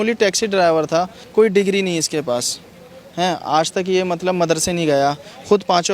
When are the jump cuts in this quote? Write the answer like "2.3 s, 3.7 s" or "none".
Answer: 1.2 s